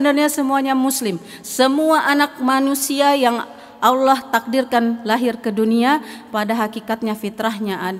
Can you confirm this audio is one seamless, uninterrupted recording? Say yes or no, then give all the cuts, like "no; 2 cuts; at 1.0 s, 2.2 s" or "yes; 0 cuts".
yes; 0 cuts